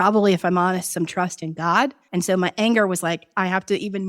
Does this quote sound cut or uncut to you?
cut